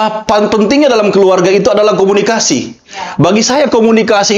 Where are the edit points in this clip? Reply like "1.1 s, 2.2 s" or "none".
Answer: none